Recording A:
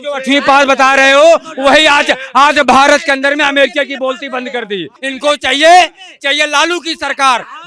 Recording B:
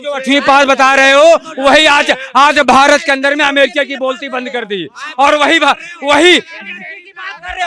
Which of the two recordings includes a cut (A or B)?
A